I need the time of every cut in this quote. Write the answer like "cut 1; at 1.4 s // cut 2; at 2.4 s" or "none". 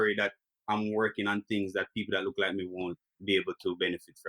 cut 1; at 3.1 s